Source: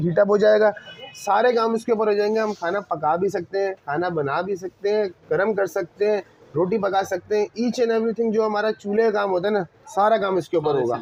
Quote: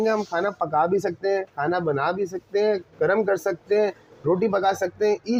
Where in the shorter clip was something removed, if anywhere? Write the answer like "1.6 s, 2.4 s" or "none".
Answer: none